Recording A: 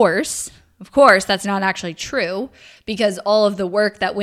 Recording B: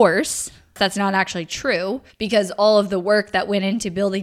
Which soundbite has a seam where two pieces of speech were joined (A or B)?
B